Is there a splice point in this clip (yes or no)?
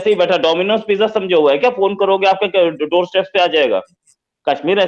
no